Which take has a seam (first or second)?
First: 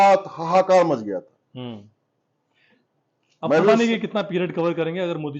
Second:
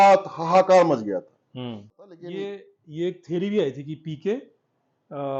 second